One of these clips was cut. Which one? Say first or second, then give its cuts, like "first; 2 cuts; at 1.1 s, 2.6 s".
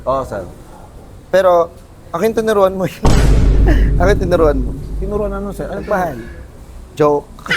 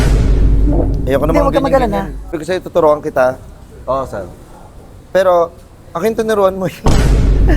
second; 1 cut; at 2.4 s